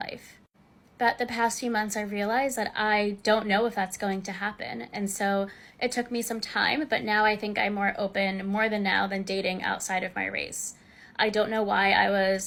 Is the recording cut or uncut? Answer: uncut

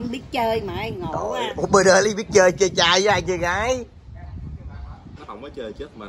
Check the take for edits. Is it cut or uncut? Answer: uncut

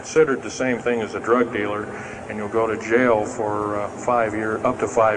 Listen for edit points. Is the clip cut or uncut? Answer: uncut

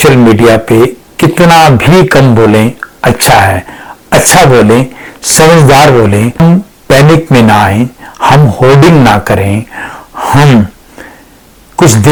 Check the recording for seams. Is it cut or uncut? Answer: uncut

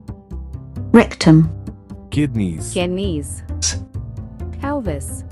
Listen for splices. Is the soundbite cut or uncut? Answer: cut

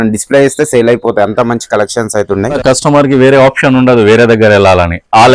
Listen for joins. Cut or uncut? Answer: cut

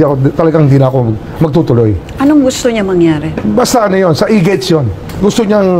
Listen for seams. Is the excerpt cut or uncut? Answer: uncut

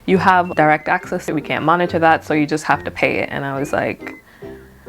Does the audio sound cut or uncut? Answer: cut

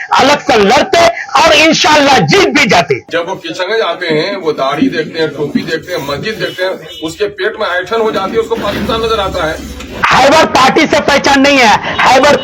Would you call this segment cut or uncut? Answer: cut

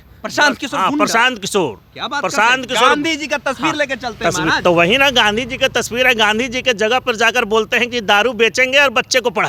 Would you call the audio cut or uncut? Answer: uncut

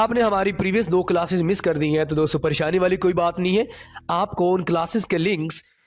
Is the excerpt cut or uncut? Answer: uncut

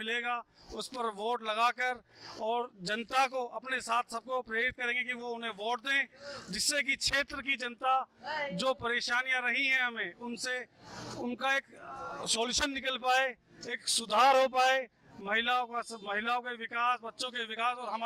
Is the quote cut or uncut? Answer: uncut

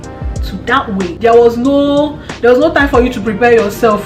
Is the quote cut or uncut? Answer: cut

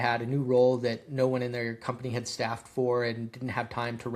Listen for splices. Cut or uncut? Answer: uncut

